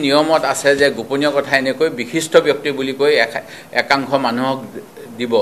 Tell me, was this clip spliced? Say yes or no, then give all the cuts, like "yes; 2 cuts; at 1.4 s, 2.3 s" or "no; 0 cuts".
no; 0 cuts